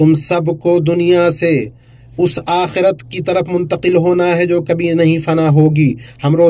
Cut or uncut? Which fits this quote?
uncut